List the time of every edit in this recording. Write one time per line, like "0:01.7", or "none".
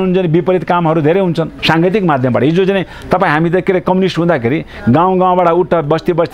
0:01.5